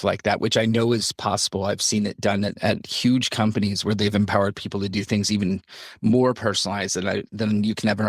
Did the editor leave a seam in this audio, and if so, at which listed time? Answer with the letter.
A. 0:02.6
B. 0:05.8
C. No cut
A